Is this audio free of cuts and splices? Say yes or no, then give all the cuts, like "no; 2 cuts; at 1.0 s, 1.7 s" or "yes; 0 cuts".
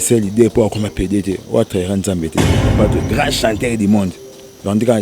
no; 1 cut; at 2.6 s